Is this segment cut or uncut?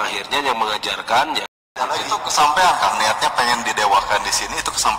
cut